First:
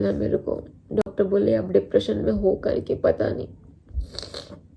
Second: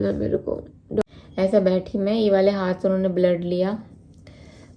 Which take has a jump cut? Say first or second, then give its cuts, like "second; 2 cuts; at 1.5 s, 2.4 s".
second; 1 cut; at 1.1 s